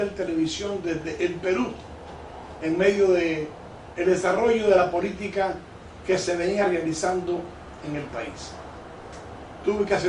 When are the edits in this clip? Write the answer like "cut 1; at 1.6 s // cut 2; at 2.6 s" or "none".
none